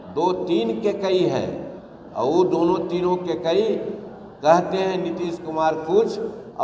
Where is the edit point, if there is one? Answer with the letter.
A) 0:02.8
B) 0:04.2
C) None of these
C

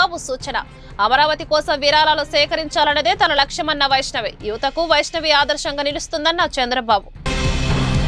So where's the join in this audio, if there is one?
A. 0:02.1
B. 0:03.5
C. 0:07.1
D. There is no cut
C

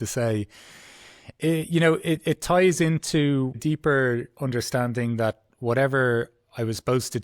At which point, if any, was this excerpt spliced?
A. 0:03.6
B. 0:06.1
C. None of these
A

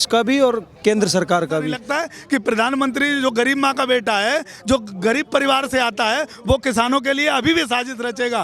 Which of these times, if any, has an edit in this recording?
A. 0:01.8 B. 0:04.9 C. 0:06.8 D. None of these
A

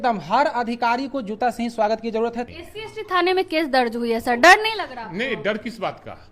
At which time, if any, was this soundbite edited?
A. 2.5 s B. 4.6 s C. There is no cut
A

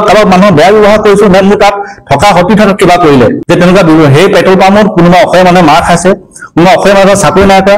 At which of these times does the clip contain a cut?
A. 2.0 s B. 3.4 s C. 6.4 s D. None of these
B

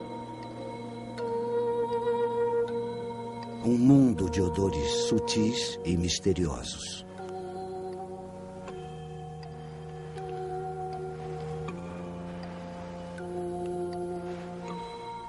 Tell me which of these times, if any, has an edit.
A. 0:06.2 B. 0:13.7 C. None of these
C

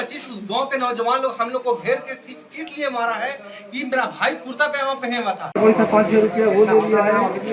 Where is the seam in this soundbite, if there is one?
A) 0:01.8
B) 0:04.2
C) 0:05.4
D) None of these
C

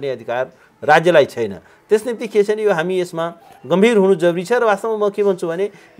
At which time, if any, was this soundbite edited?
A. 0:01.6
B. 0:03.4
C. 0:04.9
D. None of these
D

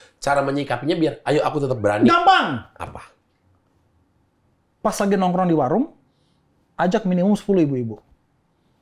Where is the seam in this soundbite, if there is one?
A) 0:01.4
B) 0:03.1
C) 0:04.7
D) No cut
D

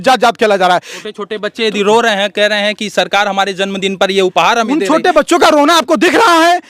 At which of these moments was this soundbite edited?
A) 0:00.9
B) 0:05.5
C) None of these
A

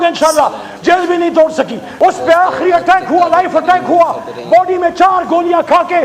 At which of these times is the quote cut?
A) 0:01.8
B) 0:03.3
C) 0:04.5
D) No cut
A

